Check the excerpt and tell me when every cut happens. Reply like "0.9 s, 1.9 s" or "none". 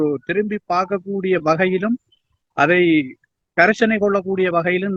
none